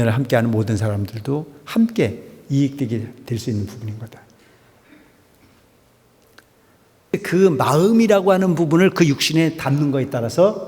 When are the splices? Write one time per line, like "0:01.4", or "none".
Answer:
0:07.1